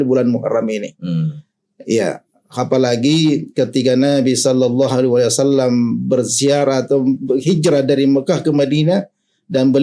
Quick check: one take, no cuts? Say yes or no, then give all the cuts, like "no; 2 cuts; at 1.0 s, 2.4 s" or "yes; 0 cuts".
yes; 0 cuts